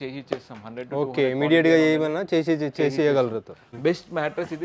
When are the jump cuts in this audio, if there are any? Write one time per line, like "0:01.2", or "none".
0:03.7